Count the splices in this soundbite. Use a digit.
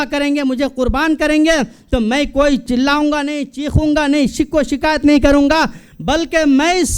1